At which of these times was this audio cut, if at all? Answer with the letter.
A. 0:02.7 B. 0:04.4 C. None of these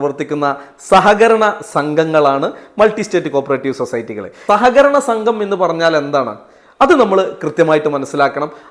B